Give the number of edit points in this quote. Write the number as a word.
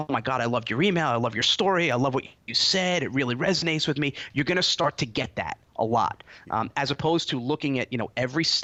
zero